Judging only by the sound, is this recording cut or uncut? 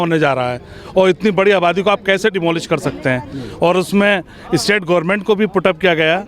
uncut